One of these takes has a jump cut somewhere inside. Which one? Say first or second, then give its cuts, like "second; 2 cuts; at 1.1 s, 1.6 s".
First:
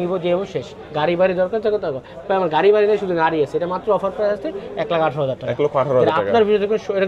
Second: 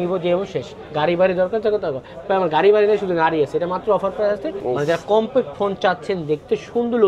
second; 1 cut; at 4.5 s